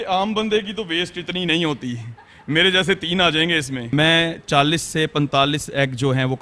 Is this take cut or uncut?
cut